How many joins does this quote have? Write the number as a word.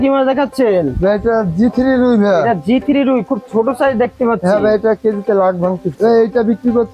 one